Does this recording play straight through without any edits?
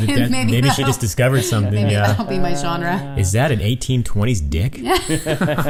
yes; 0 cuts

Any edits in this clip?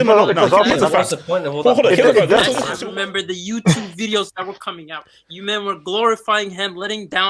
yes; 1 cut; at 2.7 s

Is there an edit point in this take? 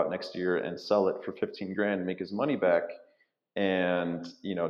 no; 0 cuts

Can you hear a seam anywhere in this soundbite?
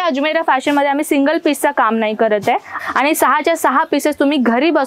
yes; 1 cut; at 2.7 s

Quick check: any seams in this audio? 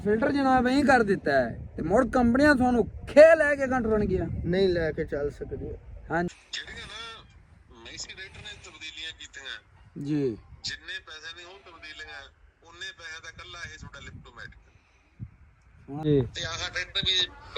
yes; 2 cuts; at 6.3 s, 16.0 s

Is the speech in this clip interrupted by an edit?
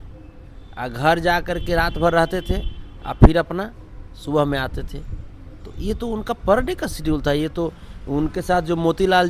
no; 0 cuts

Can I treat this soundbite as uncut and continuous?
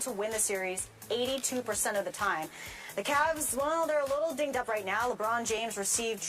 no; 1 cut; at 3.5 s

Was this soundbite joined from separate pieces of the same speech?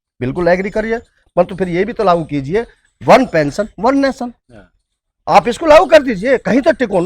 no; 0 cuts

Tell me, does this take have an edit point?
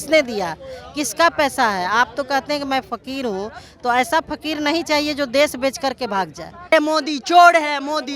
yes; 1 cut; at 6.7 s

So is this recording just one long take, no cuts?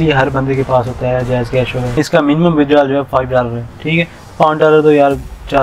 no; 1 cut; at 1.9 s

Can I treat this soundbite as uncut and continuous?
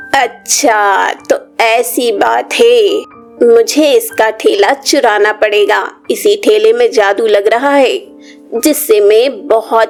yes; 0 cuts

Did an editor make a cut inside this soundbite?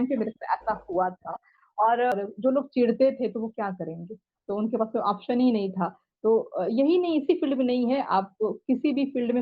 yes; 1 cut; at 2.1 s

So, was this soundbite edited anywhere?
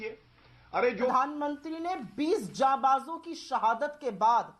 yes; 1 cut; at 1.1 s

